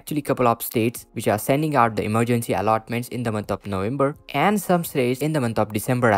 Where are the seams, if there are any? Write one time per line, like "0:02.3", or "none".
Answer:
0:05.2